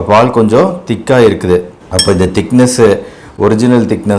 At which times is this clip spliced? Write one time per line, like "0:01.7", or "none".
none